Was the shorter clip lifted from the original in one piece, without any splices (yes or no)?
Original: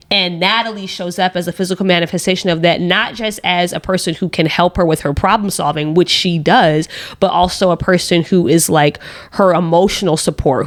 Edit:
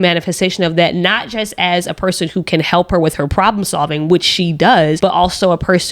no